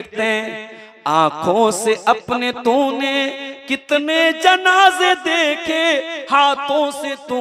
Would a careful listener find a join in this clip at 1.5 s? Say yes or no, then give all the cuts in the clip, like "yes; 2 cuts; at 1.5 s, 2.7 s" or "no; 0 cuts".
no; 0 cuts